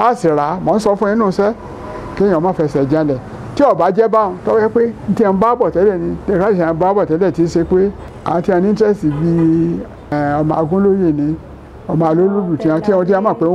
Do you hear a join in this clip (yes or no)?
yes